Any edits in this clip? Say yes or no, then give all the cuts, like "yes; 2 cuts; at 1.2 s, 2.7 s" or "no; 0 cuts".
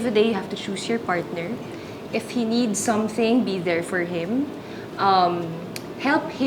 no; 0 cuts